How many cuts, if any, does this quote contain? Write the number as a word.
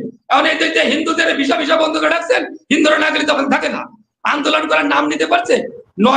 zero